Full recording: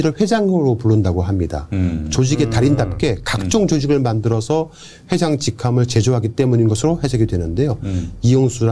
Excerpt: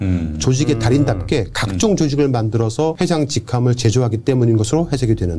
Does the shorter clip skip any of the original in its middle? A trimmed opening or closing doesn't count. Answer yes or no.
yes